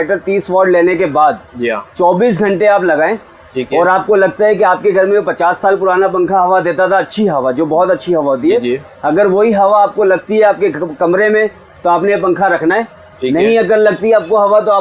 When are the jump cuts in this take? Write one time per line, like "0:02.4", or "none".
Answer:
none